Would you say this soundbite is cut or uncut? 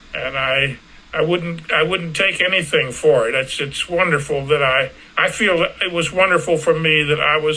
uncut